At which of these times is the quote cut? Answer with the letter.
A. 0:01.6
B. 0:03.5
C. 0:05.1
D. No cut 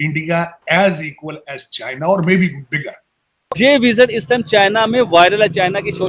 B